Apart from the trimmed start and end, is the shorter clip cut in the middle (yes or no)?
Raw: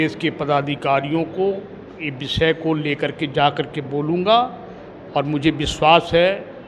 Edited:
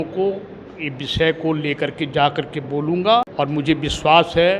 yes